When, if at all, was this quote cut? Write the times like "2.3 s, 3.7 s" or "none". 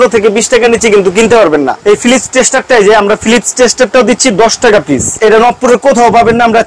1.8 s, 5.1 s